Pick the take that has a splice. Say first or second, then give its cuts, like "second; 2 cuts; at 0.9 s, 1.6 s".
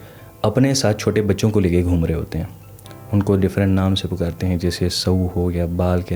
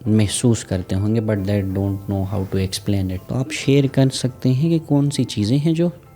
second; 1 cut; at 3.2 s